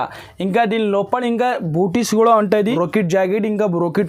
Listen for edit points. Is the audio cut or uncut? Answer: cut